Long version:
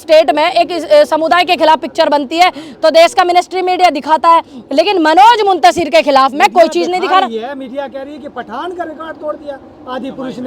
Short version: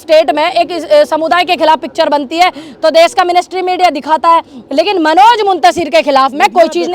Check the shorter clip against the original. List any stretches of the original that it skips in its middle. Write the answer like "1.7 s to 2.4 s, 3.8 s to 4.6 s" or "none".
none